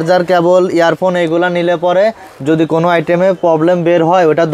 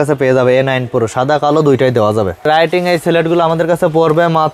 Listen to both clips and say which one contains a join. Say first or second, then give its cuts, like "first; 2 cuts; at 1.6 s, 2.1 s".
second; 1 cut; at 2.4 s